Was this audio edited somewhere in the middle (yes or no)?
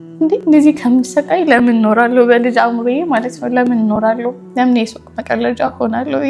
no